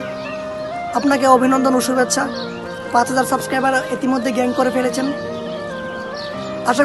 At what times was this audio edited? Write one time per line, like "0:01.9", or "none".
none